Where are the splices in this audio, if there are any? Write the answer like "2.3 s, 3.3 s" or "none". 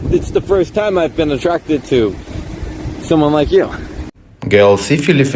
4.3 s